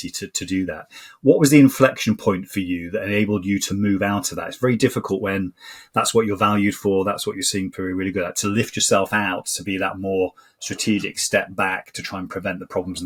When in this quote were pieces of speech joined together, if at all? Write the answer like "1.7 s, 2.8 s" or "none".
none